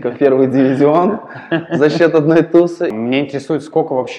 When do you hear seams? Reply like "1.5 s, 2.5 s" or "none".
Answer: 2.9 s